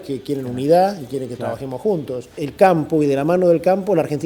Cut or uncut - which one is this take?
cut